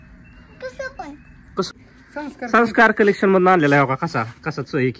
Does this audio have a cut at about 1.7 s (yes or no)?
yes